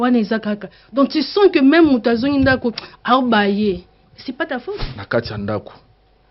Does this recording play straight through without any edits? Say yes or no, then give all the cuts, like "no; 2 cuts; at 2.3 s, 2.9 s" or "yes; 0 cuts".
no; 1 cut; at 5.0 s